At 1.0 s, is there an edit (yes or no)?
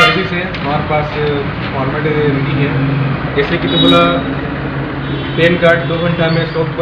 no